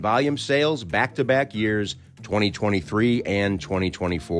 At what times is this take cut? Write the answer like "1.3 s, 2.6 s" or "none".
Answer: none